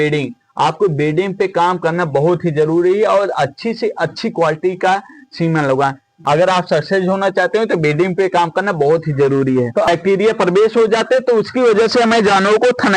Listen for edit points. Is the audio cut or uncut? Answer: cut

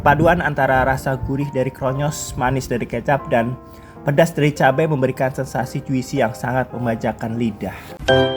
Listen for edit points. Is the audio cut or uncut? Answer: uncut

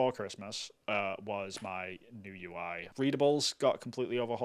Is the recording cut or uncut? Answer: cut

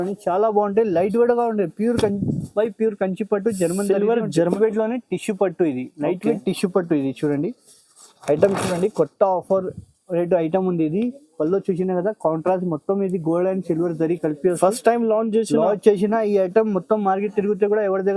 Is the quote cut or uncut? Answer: cut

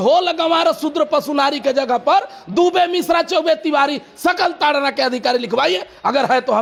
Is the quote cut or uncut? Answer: uncut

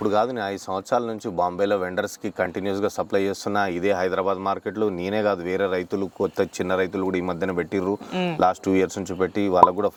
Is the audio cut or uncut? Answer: uncut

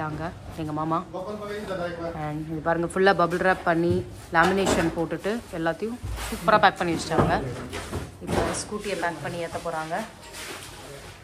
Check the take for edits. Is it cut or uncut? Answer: uncut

